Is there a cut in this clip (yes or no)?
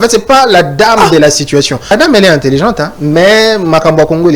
yes